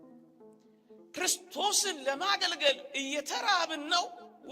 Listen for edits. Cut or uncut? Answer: cut